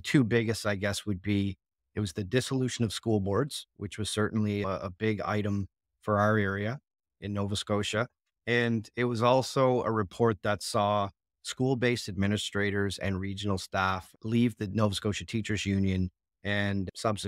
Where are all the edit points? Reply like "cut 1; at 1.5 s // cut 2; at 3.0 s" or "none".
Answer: none